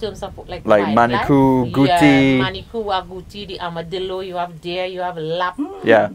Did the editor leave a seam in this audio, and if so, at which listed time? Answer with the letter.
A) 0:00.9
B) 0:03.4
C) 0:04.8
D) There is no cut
D